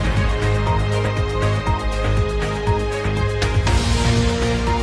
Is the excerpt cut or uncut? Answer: cut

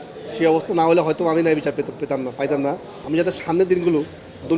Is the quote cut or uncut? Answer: cut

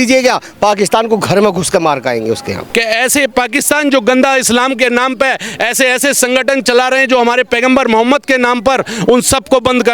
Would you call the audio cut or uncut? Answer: cut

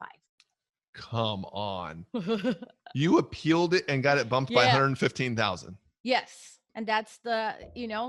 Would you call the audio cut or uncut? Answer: uncut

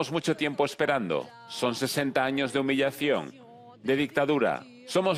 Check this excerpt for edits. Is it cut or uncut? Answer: uncut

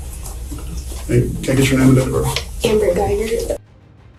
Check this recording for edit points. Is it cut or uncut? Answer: uncut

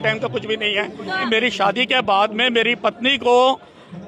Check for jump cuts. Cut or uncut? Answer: cut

